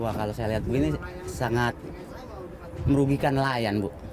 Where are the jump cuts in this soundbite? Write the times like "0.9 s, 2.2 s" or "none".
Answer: none